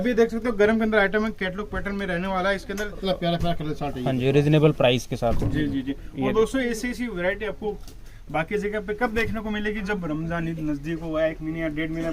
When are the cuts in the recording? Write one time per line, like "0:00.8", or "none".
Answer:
0:03.0